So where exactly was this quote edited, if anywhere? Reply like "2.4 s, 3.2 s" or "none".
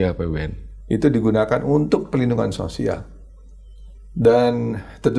none